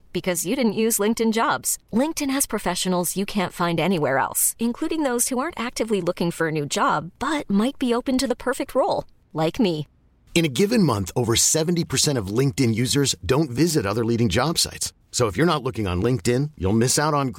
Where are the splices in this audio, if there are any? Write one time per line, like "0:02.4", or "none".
none